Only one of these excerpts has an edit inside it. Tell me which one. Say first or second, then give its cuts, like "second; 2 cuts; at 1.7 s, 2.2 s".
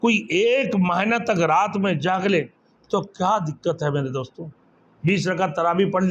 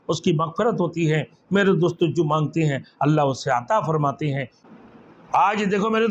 second; 1 cut; at 4.5 s